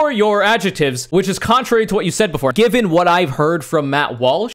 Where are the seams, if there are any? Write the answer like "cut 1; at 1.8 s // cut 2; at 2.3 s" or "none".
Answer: cut 1; at 1.0 s